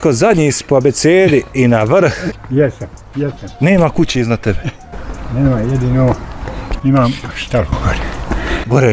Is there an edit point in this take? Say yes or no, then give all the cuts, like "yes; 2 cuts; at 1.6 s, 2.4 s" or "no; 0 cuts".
yes; 1 cut; at 2.3 s